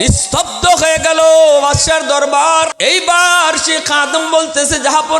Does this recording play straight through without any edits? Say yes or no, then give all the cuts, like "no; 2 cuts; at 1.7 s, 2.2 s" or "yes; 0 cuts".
no; 1 cut; at 2.7 s